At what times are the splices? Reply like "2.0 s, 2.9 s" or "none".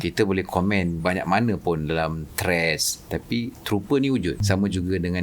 1.0 s, 4.4 s